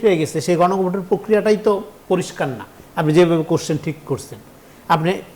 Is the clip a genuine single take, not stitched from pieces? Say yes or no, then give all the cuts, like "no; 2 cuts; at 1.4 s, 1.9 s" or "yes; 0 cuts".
yes; 0 cuts